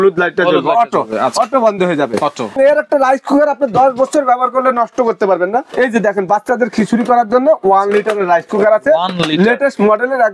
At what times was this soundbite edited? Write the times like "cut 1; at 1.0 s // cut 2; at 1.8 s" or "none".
cut 1; at 2.5 s // cut 2; at 5.7 s